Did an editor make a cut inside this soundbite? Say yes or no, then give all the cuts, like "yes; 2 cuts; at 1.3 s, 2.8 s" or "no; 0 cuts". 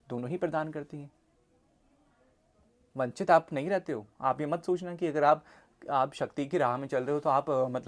no; 0 cuts